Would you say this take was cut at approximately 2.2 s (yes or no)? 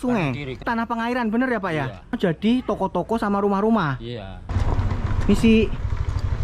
yes